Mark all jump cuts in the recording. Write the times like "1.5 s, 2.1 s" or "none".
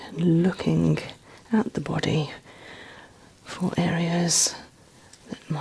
none